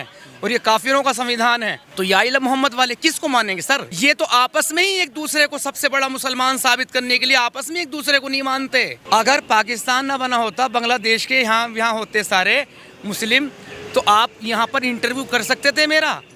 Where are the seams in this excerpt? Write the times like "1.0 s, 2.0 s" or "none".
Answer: 1.8 s, 3.9 s, 8.9 s